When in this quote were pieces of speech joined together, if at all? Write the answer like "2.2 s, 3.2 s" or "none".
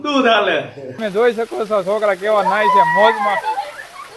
1.0 s